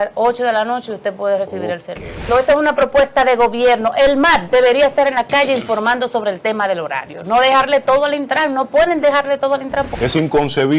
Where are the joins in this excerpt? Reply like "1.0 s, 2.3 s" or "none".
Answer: 2.3 s, 9.9 s